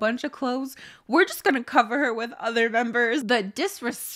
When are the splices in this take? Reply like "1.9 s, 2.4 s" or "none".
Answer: 3.2 s